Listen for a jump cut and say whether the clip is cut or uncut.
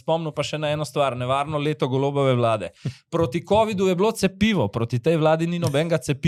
uncut